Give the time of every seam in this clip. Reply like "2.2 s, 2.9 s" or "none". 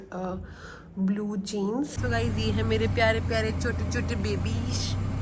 2.0 s